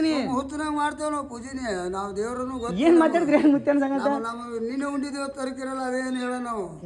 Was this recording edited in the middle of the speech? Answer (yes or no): no